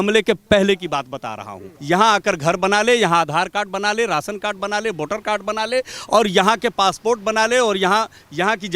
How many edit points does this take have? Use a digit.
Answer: 1